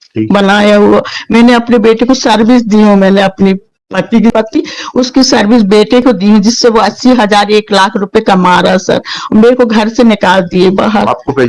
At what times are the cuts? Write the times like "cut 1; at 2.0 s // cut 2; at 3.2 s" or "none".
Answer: cut 1; at 4.3 s